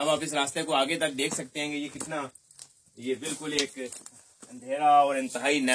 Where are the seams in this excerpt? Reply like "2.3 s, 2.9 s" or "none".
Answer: none